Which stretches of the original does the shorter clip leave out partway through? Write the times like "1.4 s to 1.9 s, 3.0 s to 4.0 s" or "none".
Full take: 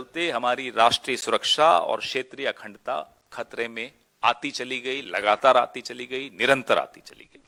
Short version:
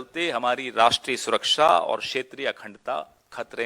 none